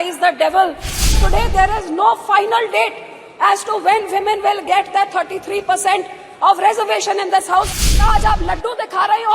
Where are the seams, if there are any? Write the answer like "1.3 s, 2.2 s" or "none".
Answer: 1.0 s, 7.7 s